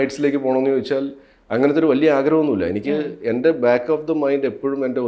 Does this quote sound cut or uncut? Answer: uncut